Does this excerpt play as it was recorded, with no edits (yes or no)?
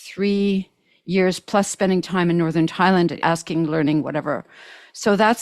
no